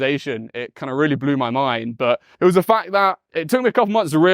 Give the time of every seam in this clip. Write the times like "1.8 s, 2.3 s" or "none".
2.3 s, 3.3 s